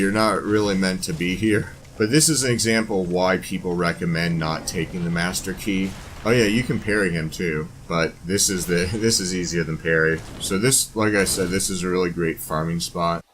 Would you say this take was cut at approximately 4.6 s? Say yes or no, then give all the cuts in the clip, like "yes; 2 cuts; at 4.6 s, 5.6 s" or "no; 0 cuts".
no; 4 cuts; at 1.8 s, 6.1 s, 7.8 s, 10.3 s